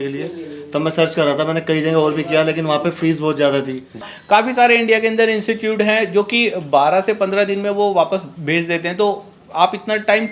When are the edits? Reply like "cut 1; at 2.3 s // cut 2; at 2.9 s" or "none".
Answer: cut 1; at 4.1 s